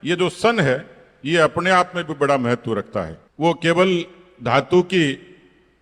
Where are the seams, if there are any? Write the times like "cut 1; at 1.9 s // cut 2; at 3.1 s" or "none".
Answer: cut 1; at 3.2 s